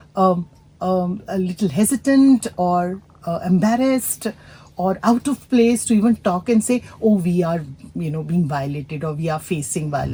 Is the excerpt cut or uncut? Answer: uncut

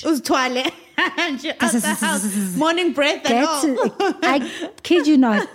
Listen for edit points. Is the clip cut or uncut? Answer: uncut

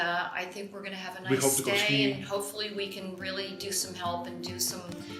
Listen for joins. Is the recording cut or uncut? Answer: uncut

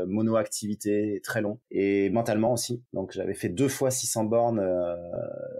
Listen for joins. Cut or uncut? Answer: cut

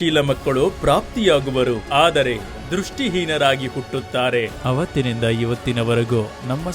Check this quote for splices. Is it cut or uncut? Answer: cut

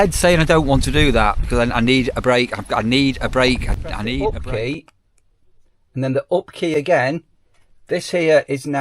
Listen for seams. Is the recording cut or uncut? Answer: cut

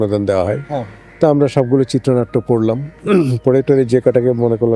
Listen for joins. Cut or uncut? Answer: uncut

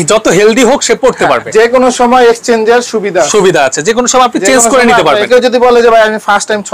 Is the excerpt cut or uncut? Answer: cut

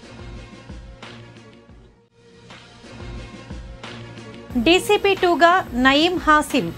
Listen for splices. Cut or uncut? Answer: cut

